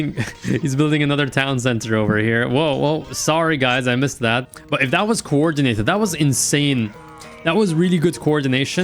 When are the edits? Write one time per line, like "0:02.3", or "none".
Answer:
0:04.6